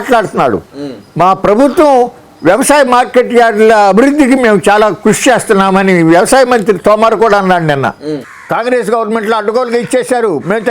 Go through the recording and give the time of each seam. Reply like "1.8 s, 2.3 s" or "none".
8.3 s